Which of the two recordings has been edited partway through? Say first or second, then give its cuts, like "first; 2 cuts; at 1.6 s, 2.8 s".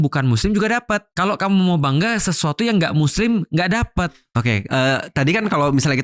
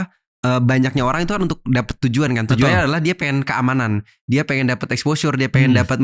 first; 2 cuts; at 1.1 s, 4.1 s